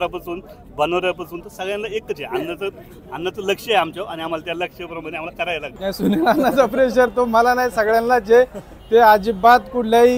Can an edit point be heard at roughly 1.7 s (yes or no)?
no